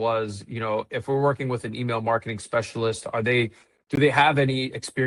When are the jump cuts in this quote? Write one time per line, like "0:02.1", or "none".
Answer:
none